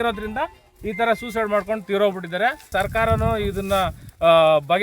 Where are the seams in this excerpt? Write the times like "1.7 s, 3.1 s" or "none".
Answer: 2.7 s